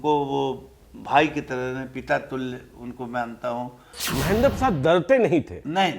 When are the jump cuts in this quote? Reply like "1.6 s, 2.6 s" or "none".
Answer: 4.0 s